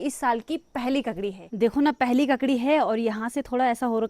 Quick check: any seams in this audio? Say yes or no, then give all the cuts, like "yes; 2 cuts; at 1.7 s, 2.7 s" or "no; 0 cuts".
yes; 1 cut; at 1.4 s